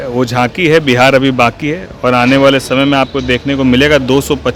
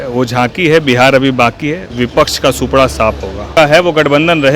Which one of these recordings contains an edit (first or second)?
second